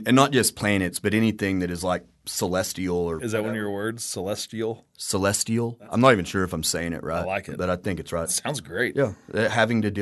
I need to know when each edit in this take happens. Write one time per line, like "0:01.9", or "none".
0:03.2
0:08.3